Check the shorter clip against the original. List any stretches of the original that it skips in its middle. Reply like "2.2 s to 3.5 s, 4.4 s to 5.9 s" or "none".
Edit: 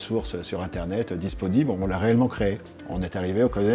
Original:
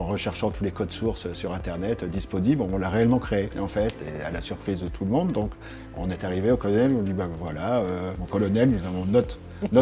3.6 s to 5.7 s